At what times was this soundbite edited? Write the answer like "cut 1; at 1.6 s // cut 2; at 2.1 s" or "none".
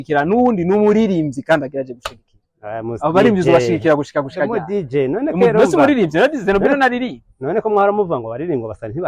none